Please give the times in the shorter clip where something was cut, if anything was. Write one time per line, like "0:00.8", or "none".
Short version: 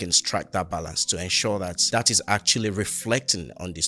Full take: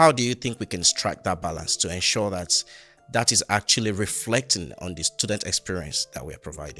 0:01.8